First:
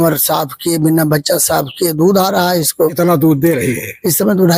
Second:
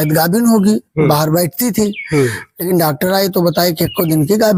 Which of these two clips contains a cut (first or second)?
first